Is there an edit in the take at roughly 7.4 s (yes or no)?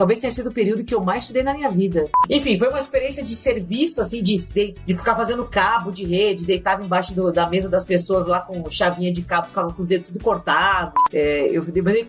no